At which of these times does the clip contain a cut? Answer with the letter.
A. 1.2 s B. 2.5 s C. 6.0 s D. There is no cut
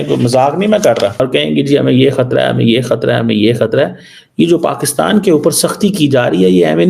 A